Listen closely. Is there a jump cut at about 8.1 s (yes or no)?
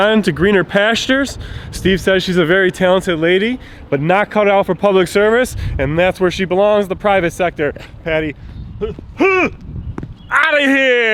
no